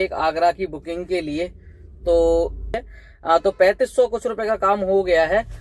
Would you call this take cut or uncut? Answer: cut